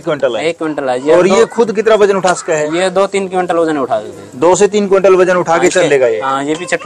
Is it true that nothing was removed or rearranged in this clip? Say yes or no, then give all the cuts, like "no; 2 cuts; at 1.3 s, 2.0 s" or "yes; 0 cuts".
yes; 0 cuts